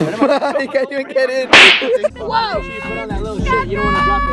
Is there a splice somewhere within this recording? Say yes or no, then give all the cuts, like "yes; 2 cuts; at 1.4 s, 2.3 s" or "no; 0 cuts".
yes; 1 cut; at 2.2 s